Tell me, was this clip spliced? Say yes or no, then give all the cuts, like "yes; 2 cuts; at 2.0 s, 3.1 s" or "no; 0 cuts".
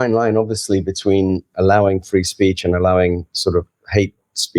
yes; 1 cut; at 1.5 s